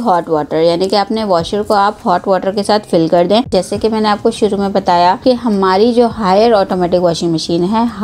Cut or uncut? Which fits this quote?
cut